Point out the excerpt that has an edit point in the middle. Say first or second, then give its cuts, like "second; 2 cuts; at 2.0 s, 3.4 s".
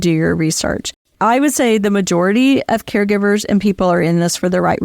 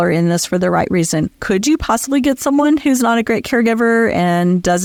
first; 1 cut; at 1.1 s